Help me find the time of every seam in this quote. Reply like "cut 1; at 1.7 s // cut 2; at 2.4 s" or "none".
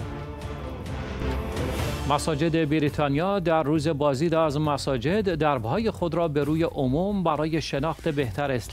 cut 1; at 1.2 s

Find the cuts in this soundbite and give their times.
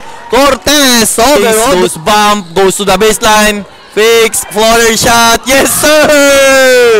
cut 1; at 1.7 s

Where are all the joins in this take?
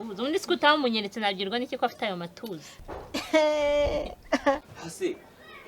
cut 1; at 4.8 s

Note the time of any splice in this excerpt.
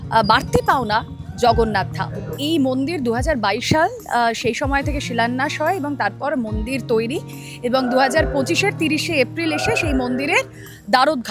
cut 1; at 2.4 s

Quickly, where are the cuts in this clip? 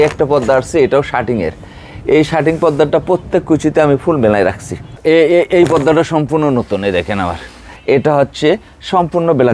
cut 1; at 5.0 s // cut 2; at 7.7 s

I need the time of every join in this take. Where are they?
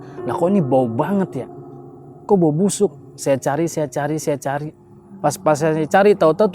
cut 1; at 5.0 s

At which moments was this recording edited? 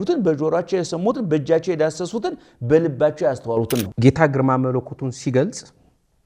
cut 1; at 3.9 s

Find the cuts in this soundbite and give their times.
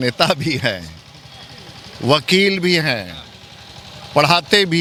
none

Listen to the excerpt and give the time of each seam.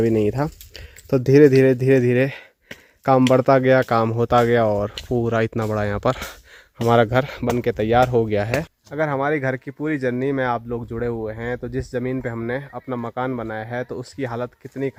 none

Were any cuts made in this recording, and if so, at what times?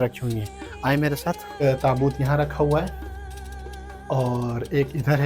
cut 1; at 1.5 s

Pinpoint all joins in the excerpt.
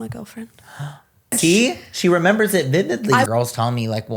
cut 1; at 1.4 s // cut 2; at 3.3 s

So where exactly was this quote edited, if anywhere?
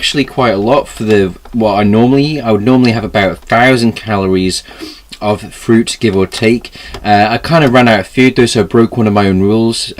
cut 1; at 8.7 s

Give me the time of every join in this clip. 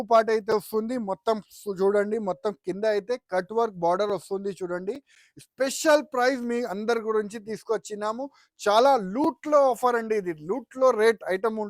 none

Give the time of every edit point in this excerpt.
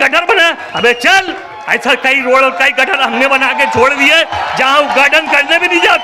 none

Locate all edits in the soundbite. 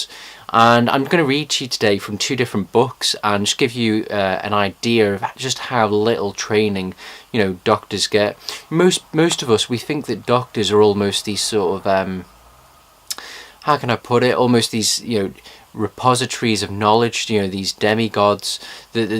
cut 1; at 1.6 s

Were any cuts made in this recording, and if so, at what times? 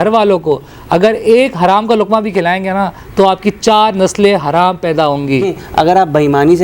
cut 1; at 5.6 s

